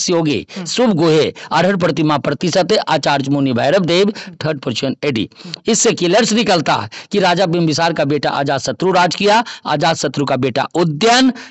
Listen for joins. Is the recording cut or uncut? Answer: uncut